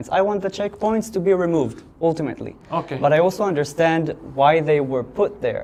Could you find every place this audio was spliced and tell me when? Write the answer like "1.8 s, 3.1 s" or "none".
none

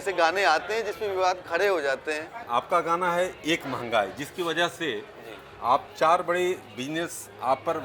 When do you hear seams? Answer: 2.4 s

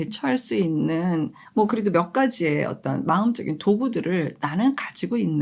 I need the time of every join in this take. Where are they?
none

